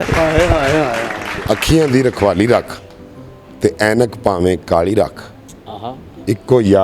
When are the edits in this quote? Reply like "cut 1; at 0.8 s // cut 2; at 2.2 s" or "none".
cut 1; at 1.4 s